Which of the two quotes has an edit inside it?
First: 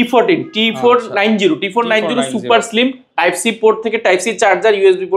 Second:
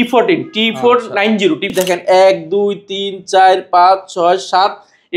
second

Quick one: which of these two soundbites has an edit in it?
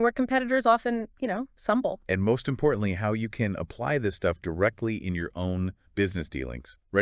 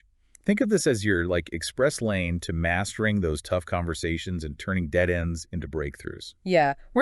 second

